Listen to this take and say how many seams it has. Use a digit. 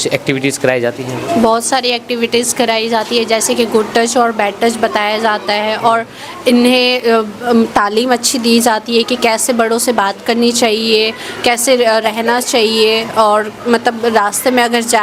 0